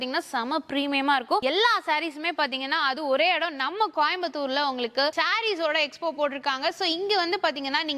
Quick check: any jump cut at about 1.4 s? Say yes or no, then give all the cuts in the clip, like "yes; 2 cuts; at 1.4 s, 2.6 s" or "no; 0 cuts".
yes; 2 cuts; at 1.4 s, 5.1 s